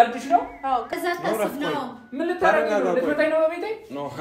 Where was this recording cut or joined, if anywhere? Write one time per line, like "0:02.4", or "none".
0:00.9